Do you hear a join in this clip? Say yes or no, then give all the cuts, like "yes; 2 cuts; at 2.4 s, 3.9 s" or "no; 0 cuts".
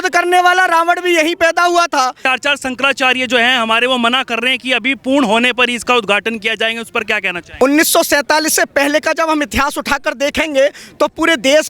yes; 2 cuts; at 2.2 s, 7.4 s